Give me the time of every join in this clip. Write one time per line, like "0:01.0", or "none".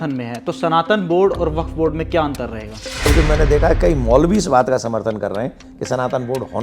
0:03.1